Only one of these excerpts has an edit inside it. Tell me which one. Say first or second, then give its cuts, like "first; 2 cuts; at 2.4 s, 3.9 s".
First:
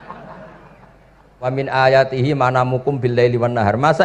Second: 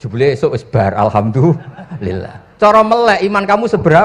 first; 1 cut; at 1.5 s